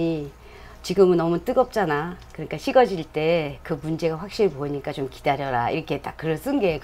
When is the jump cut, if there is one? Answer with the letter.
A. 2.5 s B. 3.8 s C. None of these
A